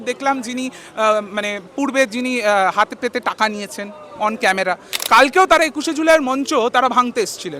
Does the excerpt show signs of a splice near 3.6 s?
no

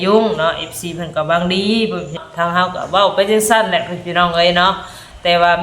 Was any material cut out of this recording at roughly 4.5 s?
no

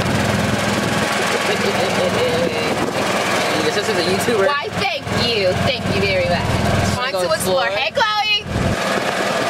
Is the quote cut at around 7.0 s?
yes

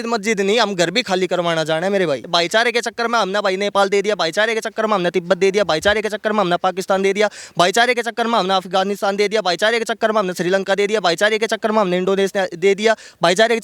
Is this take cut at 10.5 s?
no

